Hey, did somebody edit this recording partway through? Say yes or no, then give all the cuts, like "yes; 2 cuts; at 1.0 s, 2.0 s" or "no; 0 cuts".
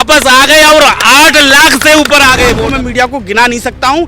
yes; 1 cut; at 2.6 s